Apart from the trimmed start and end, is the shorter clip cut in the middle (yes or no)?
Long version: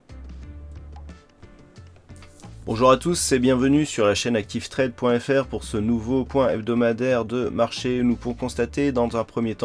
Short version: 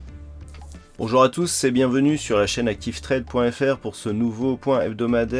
yes